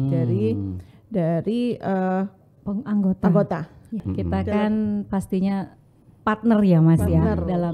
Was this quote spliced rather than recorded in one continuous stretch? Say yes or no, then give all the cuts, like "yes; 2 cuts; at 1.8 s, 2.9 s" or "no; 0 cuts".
yes; 1 cut; at 4.0 s